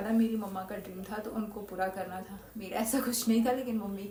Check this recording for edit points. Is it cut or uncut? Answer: uncut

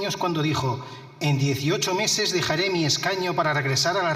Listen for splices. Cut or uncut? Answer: uncut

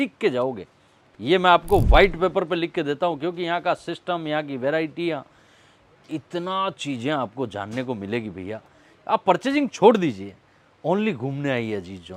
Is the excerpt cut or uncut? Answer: uncut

